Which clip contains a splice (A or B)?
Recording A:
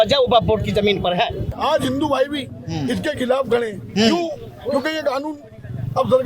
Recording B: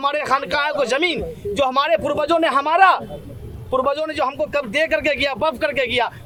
A